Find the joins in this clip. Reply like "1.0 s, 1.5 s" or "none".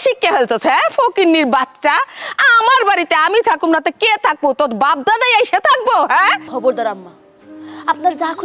6.5 s